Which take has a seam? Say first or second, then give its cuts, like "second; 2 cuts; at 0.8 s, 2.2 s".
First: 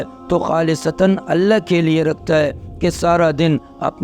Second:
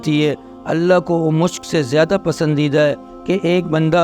second; 1 cut; at 3.1 s